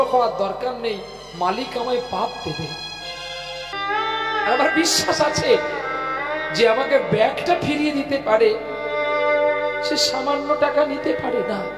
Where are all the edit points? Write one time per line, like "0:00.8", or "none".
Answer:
0:03.7